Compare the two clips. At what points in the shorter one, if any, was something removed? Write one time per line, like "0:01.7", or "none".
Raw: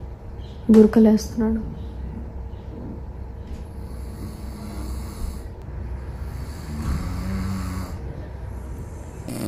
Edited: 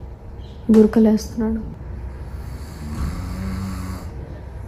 0:01.8